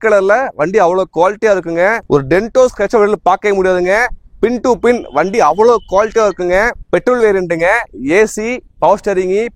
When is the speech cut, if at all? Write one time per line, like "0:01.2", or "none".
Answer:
0:02.0
0:06.8